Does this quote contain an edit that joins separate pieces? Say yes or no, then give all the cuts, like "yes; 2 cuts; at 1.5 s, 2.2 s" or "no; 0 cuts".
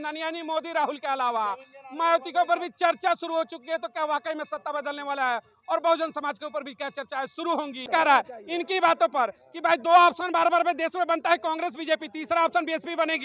yes; 1 cut; at 7.9 s